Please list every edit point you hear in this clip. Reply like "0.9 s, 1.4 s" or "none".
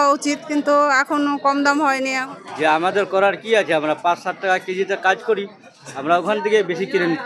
2.2 s